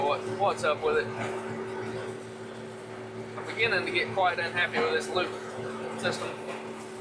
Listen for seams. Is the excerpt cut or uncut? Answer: uncut